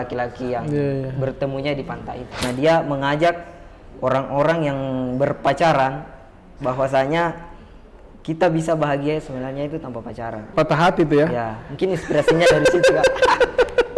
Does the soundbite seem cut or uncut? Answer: cut